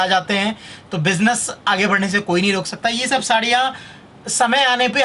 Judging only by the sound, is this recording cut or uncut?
uncut